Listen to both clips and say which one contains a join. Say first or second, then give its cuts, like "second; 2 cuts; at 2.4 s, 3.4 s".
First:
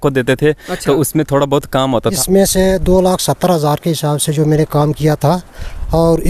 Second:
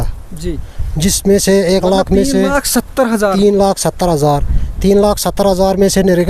first; 1 cut; at 2.2 s